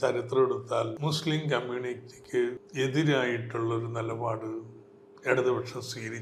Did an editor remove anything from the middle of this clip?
yes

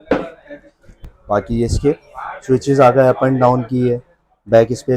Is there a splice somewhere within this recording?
yes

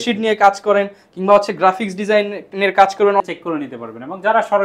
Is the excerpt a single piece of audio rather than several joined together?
no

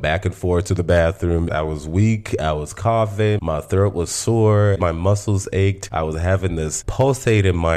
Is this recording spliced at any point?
yes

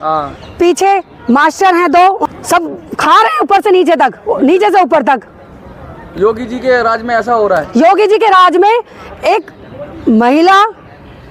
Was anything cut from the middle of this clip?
yes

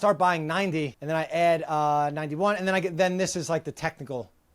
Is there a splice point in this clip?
yes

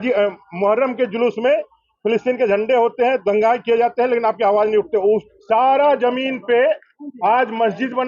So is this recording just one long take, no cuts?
no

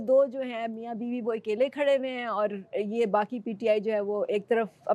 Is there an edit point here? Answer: no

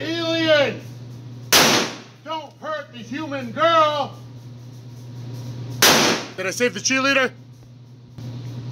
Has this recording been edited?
yes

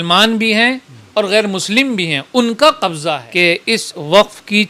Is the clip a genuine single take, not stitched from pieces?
no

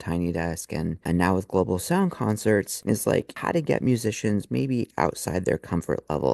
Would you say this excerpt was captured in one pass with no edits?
no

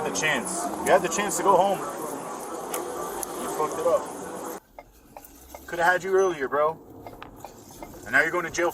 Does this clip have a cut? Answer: yes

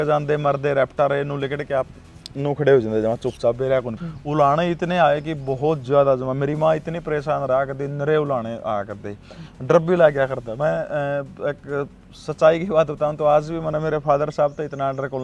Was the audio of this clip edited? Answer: yes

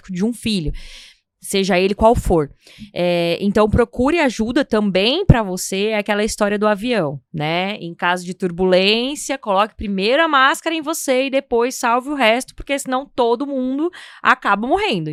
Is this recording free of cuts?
yes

